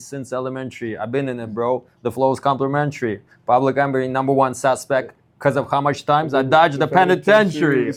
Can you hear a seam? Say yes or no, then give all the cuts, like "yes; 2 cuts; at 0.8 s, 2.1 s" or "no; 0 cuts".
no; 0 cuts